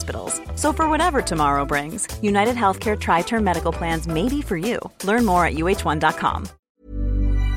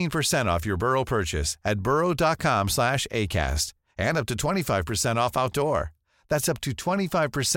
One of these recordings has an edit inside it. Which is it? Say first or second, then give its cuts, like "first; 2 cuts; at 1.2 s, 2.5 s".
first; 1 cut; at 6.5 s